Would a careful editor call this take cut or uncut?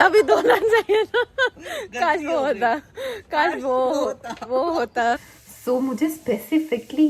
cut